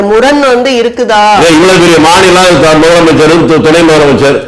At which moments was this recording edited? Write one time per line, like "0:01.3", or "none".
none